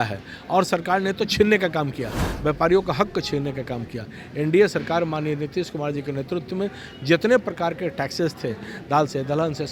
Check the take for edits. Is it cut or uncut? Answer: uncut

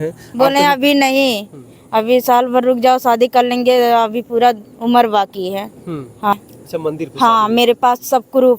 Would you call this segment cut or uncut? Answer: cut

